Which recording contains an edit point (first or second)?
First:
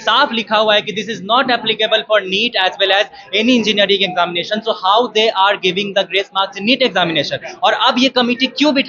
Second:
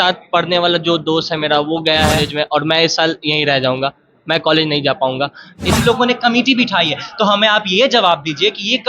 second